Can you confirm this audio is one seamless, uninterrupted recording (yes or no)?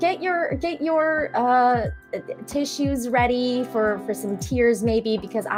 yes